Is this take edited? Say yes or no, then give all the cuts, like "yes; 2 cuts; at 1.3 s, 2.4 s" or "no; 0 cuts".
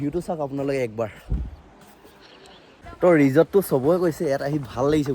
yes; 1 cut; at 2.8 s